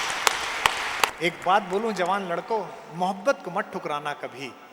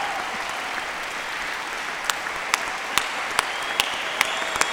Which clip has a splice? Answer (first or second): first